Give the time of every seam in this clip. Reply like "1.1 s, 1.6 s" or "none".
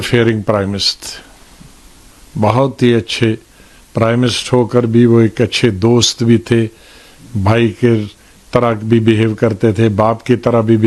none